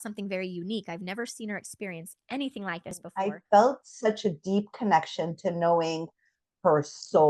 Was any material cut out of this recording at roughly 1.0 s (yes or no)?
no